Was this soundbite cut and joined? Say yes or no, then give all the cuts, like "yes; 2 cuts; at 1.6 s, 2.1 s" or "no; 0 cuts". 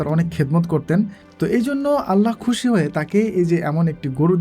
yes; 1 cut; at 1.2 s